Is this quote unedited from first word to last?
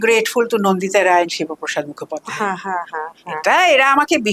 yes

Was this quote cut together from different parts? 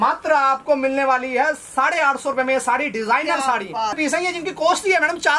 yes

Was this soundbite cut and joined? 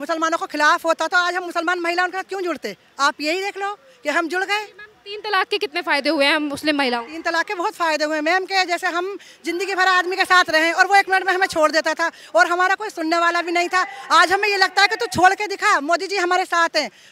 no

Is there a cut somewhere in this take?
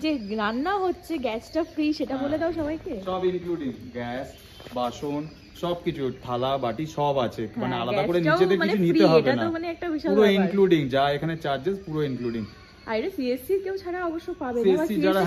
no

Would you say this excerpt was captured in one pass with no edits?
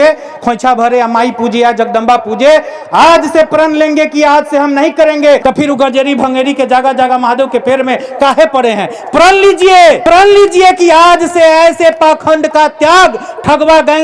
no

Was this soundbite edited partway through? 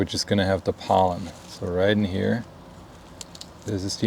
no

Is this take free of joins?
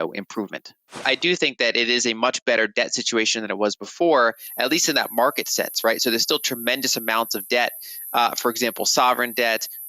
no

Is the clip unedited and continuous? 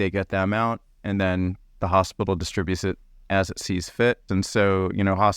no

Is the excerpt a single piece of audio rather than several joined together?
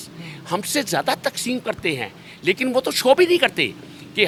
yes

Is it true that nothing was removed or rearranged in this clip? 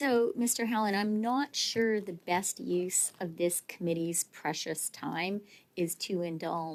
yes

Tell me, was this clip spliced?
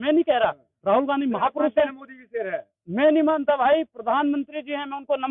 no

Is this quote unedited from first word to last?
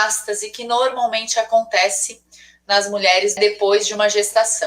no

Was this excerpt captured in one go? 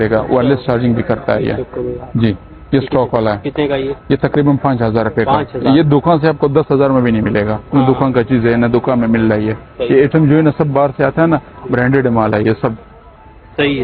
yes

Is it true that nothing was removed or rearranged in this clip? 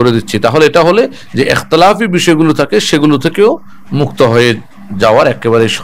yes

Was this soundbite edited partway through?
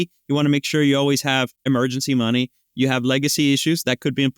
no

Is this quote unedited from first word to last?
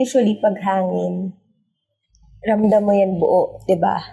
yes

